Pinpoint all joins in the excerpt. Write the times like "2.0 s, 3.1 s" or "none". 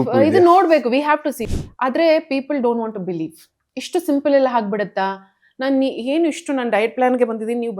1.4 s